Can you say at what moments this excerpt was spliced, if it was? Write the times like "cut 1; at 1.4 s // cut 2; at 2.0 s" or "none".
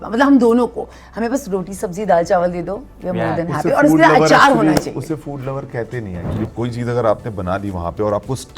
cut 1; at 6.5 s